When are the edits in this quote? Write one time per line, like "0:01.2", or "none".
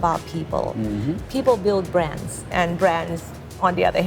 0:02.5

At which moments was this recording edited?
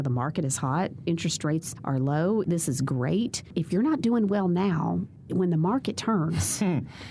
0:01.7
0:02.4
0:03.4
0:05.2

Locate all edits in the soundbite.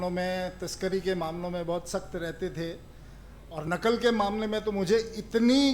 none

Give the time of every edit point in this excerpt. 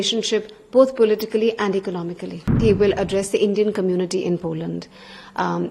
0:02.5

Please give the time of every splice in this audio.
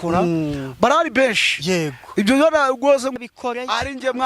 0:03.2

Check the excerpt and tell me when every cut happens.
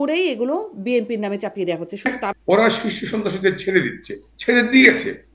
0:02.2

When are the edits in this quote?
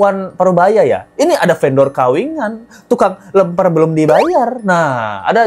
none

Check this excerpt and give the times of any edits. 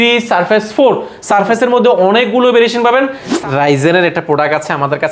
0:03.3

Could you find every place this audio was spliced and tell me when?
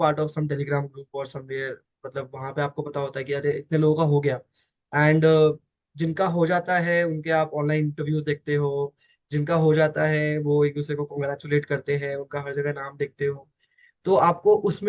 none

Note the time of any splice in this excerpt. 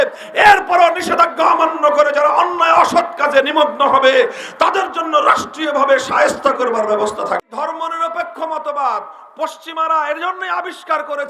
0:07.5

